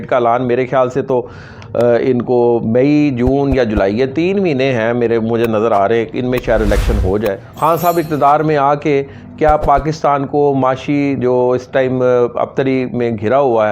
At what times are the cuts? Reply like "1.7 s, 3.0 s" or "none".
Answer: 7.4 s